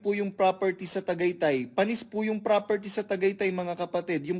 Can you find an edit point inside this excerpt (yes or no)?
no